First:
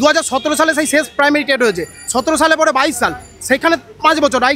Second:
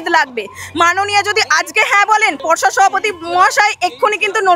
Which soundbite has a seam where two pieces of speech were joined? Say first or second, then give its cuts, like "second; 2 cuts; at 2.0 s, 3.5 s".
second; 1 cut; at 2.4 s